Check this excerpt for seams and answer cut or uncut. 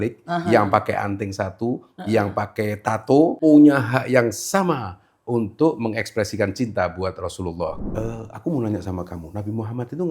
cut